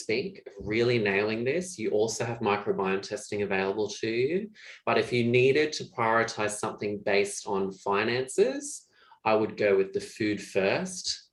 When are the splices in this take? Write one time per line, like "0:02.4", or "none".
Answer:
none